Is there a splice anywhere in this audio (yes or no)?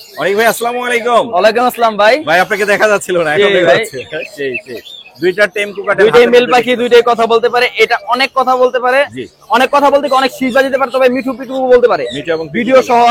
no